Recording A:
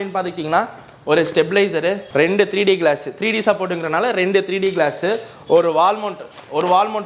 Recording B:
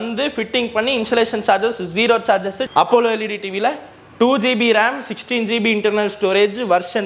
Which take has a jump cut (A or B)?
B